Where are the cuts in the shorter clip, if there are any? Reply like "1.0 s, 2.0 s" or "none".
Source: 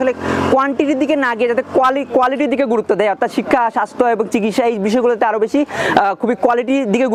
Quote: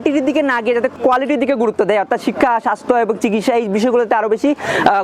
0.9 s